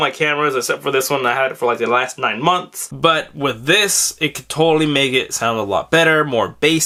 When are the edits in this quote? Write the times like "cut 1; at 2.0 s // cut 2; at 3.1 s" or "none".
none